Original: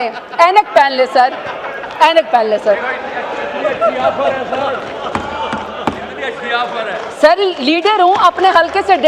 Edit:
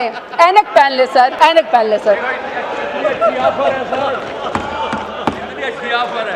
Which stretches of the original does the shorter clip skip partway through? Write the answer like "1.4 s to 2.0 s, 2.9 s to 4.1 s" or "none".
1.3 s to 1.9 s